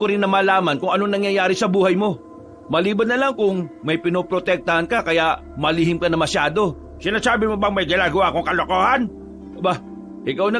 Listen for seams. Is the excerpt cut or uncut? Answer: uncut